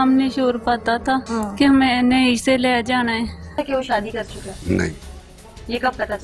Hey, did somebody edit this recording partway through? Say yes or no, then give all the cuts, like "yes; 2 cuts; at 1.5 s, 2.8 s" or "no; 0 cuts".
yes; 2 cuts; at 1.3 s, 3.6 s